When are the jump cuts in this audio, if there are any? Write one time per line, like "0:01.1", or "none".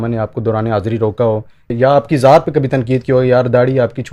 0:01.7